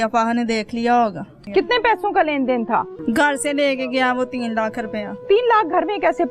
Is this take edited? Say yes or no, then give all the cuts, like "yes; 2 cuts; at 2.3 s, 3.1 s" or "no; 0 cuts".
yes; 2 cuts; at 1.3 s, 2.9 s